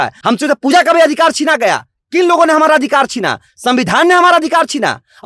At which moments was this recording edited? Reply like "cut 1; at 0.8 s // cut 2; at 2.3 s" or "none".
none